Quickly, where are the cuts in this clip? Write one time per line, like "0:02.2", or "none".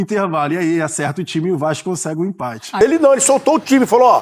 0:02.8

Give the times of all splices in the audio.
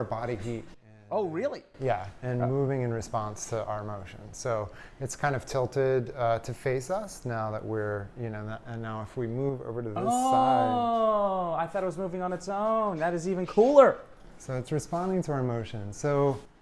none

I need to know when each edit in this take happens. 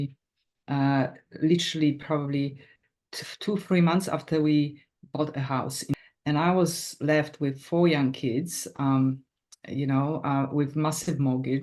0:05.9

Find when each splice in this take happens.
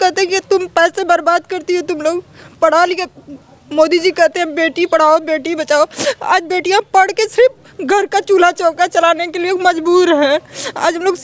none

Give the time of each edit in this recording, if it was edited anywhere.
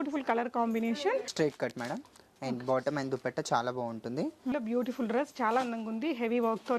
0:01.3
0:04.5

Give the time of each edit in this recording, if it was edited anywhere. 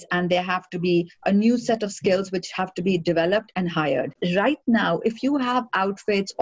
0:04.2

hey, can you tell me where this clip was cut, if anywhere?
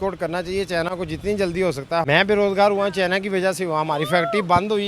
0:02.0

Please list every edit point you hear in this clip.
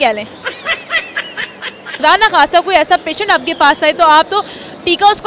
0:02.0

